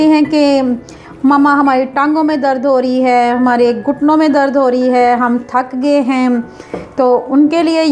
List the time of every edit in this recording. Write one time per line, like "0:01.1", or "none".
none